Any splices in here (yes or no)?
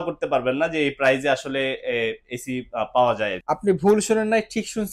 yes